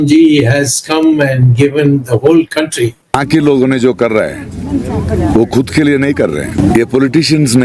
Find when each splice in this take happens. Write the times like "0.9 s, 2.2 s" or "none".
3.0 s, 6.6 s